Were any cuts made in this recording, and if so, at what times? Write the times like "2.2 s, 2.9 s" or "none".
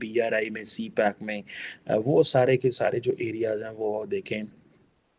none